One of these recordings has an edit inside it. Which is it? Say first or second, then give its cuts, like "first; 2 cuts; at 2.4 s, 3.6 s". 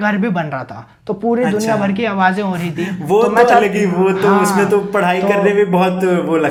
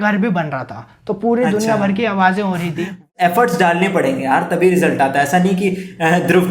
second; 1 cut; at 3.0 s